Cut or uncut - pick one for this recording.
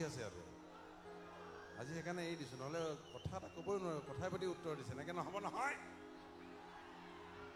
uncut